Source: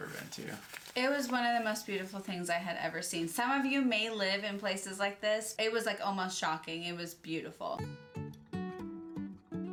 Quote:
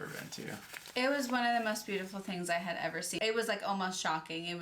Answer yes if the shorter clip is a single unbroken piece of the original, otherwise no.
no